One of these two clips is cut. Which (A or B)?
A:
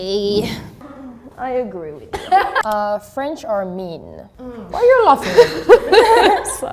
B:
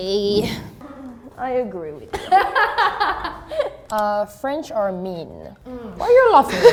A